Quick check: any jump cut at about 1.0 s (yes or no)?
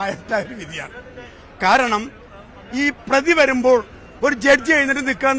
no